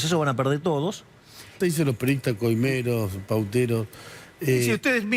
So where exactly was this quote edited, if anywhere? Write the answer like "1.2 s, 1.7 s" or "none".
1.6 s